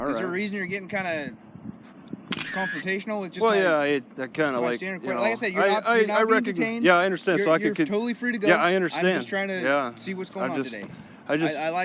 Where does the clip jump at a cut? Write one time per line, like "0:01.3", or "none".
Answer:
none

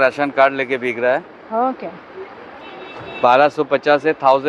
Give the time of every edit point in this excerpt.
none

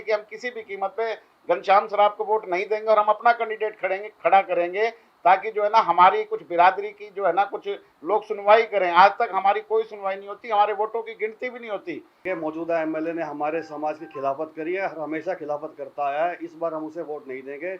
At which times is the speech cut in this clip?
0:12.2

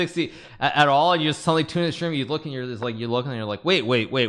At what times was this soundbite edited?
none

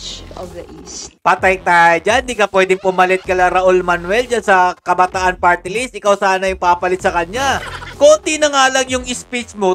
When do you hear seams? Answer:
0:01.0
0:07.8

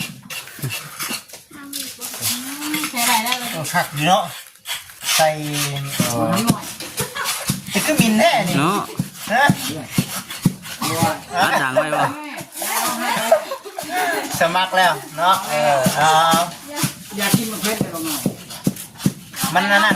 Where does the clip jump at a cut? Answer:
0:05.9

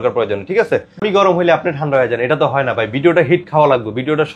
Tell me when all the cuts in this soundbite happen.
0:01.0

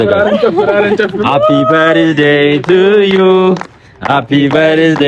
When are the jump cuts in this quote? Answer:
none

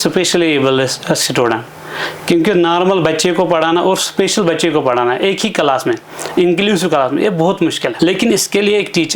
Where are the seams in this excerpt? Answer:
0:07.9

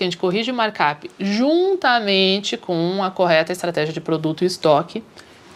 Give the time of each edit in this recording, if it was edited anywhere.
none

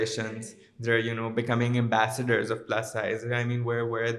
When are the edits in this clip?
none

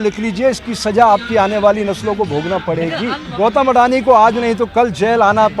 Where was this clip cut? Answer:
0:03.2

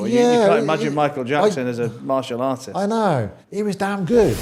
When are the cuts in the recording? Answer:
0:03.4

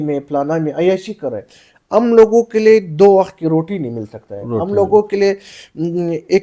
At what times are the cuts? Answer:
none

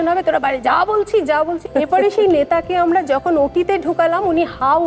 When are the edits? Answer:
0:01.7

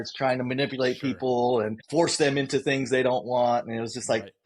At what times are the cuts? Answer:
0:01.8

